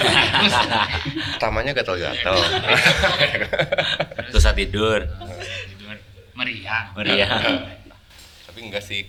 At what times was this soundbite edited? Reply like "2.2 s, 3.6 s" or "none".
none